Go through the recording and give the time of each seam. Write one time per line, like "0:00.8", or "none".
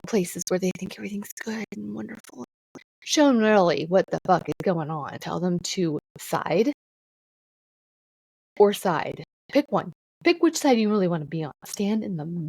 0:05.2
0:06.1
0:09.3
0:10.0